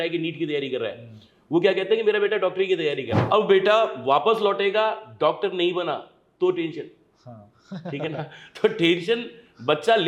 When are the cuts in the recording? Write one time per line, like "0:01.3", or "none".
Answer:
0:03.1